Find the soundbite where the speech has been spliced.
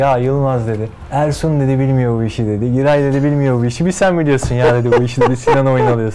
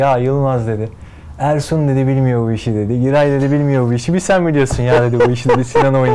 first; 1 cut; at 0.9 s

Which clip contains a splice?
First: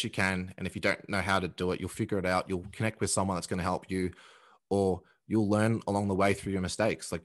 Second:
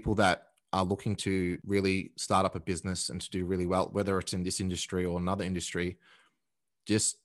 second; 1 cut; at 1.6 s

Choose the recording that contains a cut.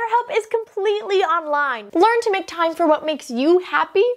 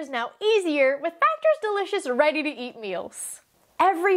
first; 1 cut; at 1.8 s

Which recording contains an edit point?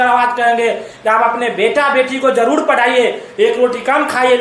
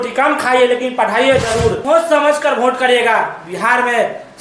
second; 1 cut; at 1.8 s

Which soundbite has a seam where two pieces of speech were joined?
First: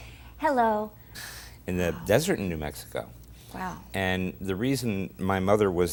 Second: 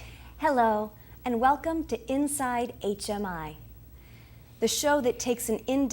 second; 1 cut; at 1.1 s

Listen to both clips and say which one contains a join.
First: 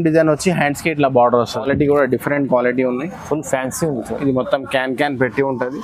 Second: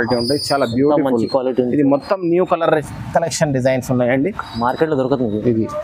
first; 1 cut; at 1.6 s

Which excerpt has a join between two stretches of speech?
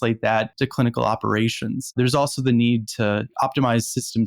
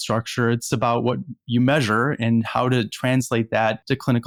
first; 1 cut; at 1.9 s

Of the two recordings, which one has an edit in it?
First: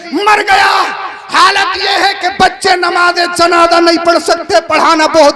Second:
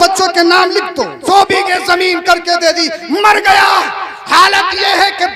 second; 1 cut; at 1.2 s

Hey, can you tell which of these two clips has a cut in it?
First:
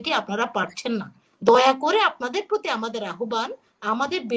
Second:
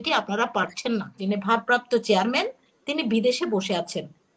second; 1 cut; at 1.2 s

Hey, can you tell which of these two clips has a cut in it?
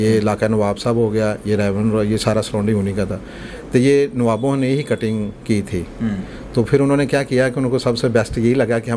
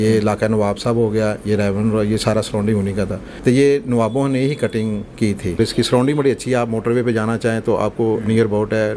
second; 2 cuts; at 3.2 s, 5.6 s

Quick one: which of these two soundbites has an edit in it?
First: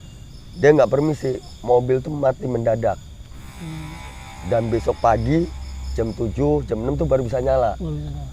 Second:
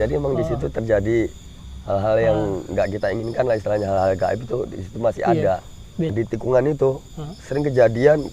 second; 1 cut; at 6.1 s

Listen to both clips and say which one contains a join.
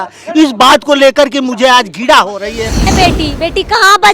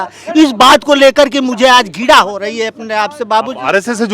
first; 1 cut; at 2.9 s

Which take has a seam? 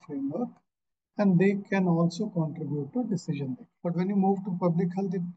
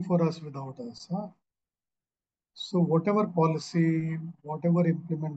first; 1 cut; at 3.7 s

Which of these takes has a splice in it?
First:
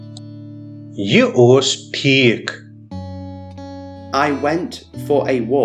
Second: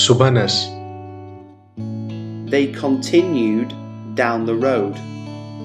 second; 3 cuts; at 1.0 s, 2.4 s, 4.9 s

